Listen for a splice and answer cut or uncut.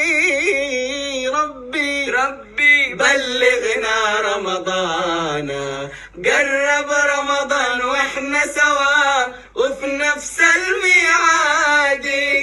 uncut